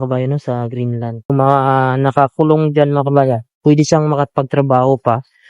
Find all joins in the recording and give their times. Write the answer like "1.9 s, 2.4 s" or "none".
1.3 s